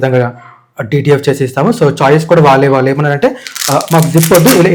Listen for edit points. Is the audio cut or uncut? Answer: uncut